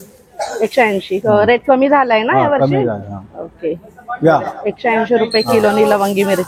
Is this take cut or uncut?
uncut